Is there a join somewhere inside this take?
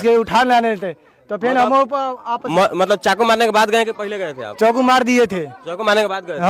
no; 0 cuts

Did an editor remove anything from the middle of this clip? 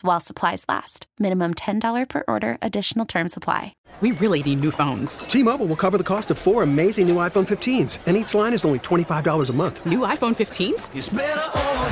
yes; 1 cut; at 3.8 s

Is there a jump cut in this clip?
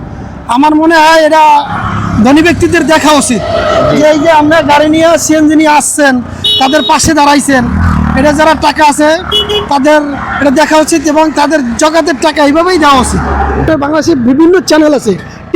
yes; 1 cut; at 13.6 s

